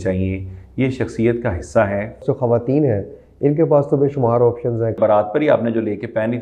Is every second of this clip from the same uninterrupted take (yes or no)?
no